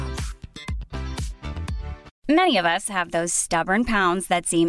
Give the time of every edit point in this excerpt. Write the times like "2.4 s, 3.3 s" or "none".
2.0 s